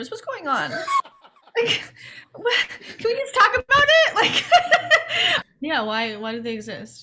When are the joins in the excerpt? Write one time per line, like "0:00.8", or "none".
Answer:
0:05.3